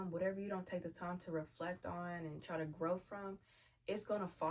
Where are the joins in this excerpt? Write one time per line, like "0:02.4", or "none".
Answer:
none